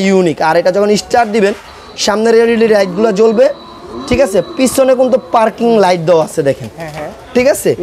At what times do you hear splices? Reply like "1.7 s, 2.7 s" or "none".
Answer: none